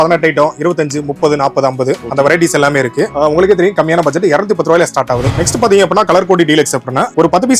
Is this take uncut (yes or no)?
yes